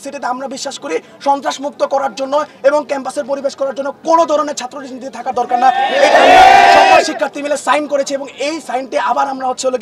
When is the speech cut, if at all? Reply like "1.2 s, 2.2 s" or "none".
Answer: none